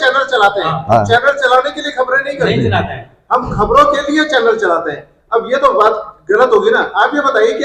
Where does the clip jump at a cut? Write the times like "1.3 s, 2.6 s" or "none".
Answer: none